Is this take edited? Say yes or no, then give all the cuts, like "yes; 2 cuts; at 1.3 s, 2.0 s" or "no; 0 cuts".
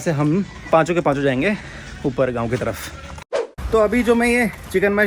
no; 0 cuts